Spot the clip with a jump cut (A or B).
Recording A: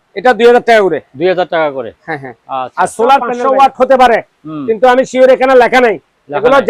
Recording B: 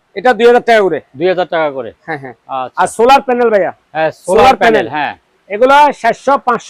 A